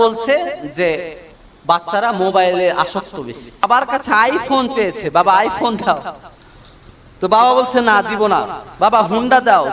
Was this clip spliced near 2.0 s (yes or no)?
no